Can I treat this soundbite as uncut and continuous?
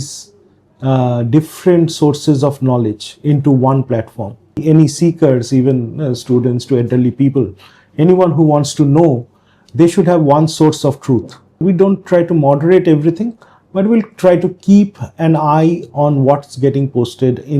no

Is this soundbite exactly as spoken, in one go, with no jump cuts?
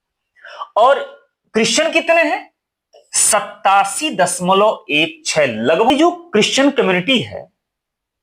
no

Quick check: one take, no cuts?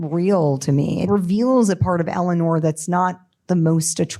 no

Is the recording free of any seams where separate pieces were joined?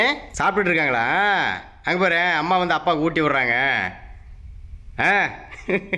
yes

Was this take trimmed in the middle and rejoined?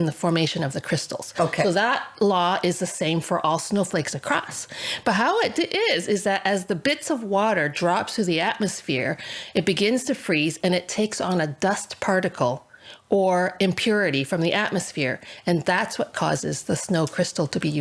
no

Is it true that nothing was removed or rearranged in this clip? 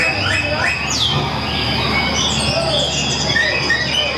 yes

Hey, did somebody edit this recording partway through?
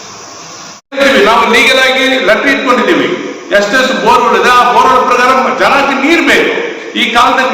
yes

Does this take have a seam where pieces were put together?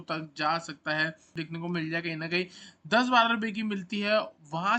yes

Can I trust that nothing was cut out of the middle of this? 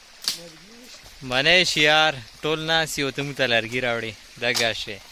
no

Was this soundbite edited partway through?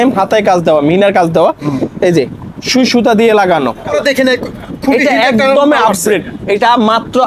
yes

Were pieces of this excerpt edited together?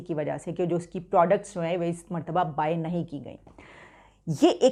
no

